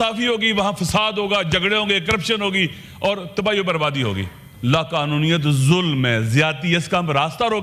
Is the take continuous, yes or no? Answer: no